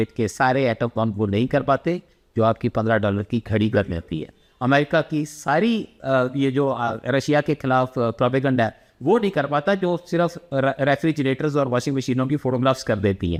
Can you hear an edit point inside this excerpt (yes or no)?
no